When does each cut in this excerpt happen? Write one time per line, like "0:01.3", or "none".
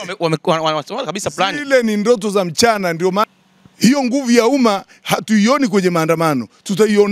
0:03.3

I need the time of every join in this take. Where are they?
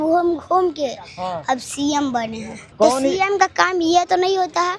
0:02.7

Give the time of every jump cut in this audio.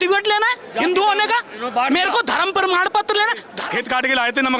0:03.5

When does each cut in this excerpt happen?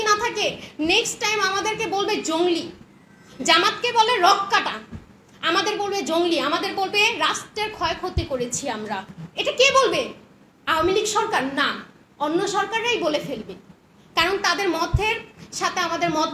0:09.2

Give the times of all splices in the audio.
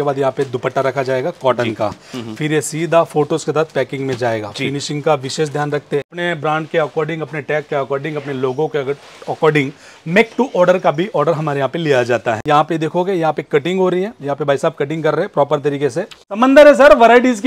0:06.2
0:12.4
0:16.4

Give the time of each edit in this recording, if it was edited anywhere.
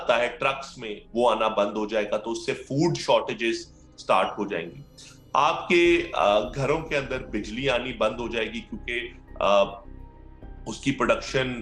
none

